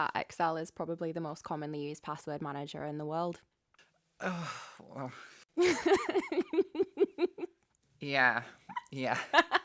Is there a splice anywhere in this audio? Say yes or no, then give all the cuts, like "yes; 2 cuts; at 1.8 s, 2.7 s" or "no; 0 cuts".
no; 0 cuts